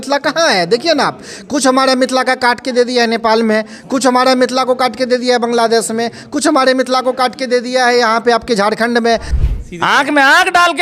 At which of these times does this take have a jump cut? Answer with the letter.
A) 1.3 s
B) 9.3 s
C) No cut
B